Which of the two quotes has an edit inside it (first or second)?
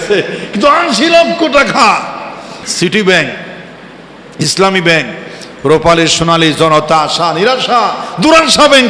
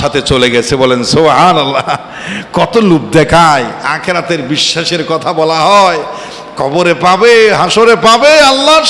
first